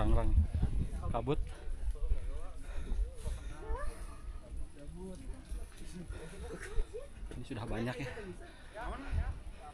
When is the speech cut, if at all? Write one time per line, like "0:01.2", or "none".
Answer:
none